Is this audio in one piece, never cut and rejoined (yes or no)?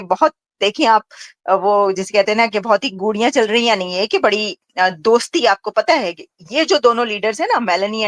yes